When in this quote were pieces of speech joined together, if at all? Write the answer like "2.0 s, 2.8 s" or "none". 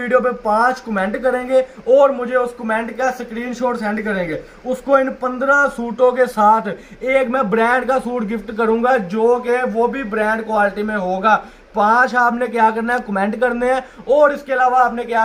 none